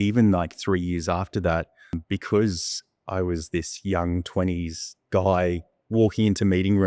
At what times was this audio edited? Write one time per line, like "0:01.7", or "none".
0:02.0